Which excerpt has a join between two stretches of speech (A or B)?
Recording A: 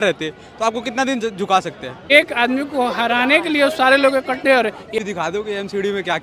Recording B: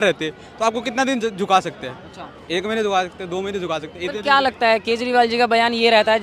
A